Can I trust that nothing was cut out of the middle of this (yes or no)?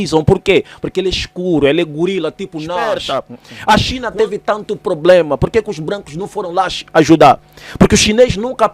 no